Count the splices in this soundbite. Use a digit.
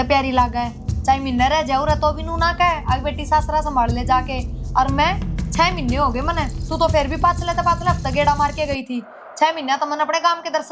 0